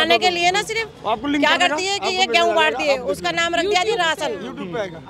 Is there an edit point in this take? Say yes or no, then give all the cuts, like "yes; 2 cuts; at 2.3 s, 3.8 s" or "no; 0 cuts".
no; 0 cuts